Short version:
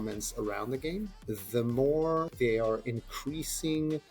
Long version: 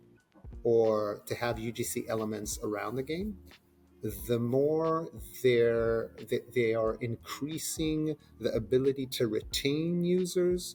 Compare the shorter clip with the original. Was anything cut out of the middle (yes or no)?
yes